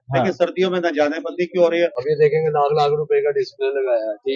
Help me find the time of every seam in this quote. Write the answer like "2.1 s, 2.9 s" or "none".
2.0 s

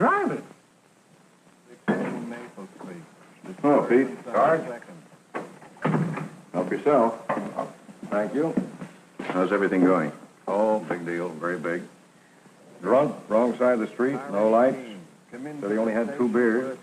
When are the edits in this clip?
none

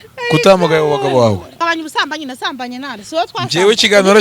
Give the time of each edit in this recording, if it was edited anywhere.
1.6 s

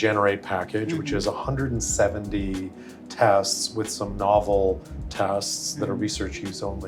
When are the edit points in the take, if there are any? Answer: none

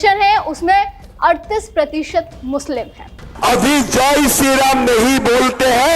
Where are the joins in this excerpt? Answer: 3.2 s

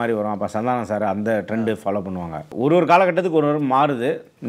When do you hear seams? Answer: 2.5 s

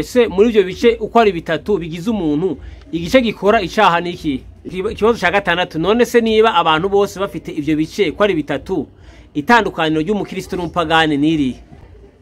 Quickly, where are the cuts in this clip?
4.7 s

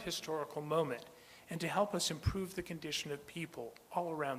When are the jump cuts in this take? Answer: 3.3 s

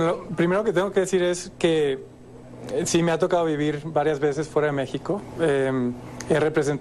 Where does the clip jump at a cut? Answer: 3.9 s

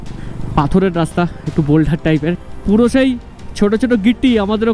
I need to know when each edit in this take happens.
2.5 s

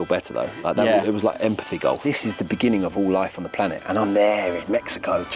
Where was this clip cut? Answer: 2.0 s

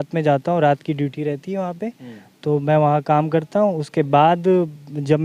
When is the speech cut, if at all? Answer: none

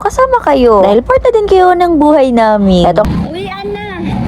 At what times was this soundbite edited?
3.1 s

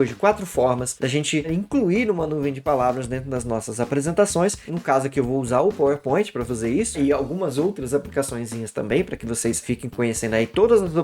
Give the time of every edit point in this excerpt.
1.5 s, 4.6 s, 7.0 s, 9.6 s

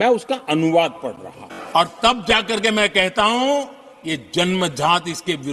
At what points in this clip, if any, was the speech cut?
1.5 s

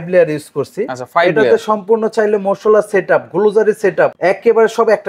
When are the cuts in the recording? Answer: 4.2 s

